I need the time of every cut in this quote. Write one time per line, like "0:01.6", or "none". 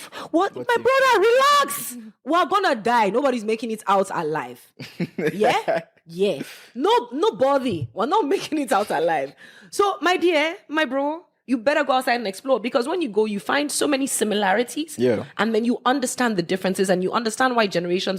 none